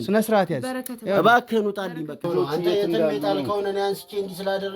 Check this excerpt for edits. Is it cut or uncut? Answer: cut